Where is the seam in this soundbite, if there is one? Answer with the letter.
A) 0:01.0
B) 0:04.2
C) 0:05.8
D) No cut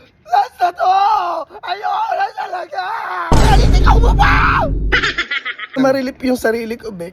C